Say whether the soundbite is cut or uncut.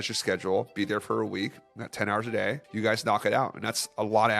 cut